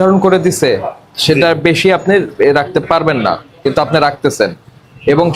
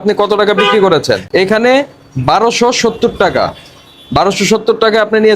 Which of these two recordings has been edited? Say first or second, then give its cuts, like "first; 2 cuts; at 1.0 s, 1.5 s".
second; 1 cut; at 1.2 s